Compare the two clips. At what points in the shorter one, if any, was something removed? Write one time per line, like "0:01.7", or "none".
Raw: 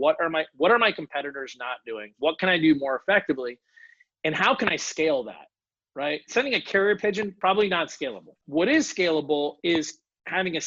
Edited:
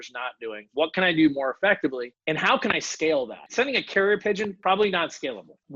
0:02.1
0:03.4